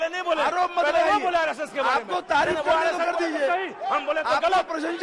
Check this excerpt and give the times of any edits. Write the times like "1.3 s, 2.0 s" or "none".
none